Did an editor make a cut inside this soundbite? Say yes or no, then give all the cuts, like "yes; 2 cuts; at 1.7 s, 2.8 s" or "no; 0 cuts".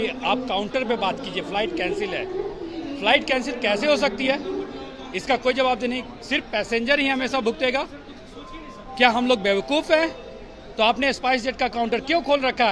no; 0 cuts